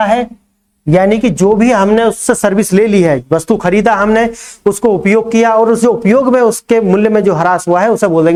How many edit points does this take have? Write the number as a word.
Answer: zero